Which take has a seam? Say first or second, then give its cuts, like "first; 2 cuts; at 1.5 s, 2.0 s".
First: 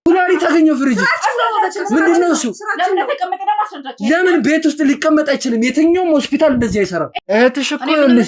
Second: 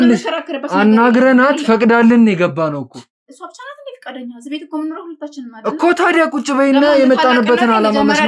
first; 1 cut; at 7.1 s